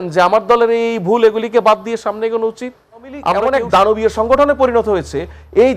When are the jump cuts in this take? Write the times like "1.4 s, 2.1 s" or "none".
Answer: 3.4 s